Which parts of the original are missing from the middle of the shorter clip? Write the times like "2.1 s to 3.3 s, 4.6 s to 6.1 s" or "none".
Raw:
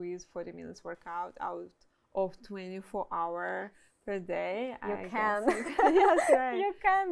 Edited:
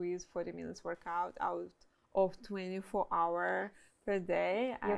none